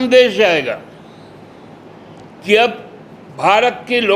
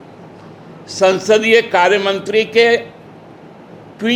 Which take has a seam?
first; 1 cut; at 1.8 s

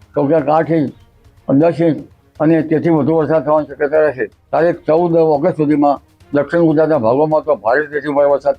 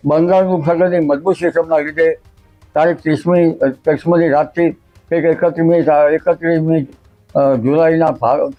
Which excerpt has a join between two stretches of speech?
first; 1 cut; at 4.3 s

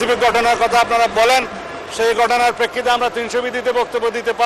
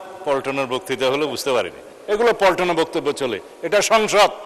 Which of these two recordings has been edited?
second; 1 cut; at 2.0 s

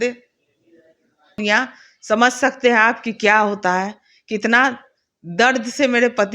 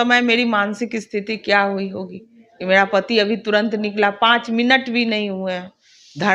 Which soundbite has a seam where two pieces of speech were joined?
first; 1 cut; at 1.4 s

